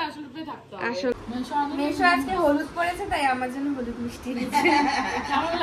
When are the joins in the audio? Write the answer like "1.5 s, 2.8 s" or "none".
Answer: 1.1 s